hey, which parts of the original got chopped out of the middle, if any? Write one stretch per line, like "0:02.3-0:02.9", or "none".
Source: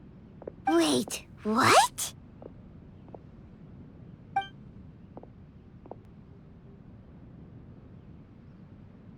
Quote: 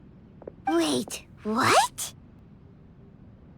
0:02.4-0:06.0